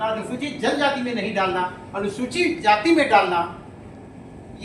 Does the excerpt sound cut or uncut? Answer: uncut